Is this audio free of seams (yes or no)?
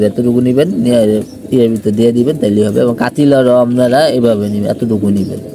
yes